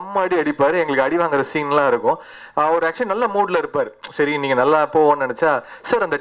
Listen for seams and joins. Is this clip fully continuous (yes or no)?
yes